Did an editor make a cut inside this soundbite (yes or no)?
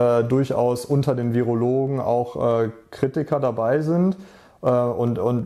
no